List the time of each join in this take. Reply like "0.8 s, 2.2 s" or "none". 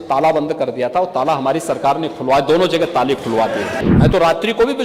3.7 s